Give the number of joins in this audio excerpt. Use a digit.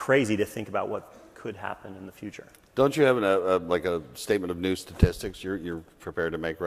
1